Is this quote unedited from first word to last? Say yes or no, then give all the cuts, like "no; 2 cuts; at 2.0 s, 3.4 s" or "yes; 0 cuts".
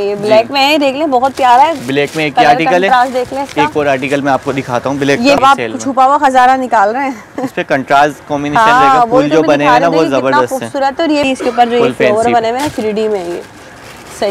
no; 2 cuts; at 5.4 s, 11.3 s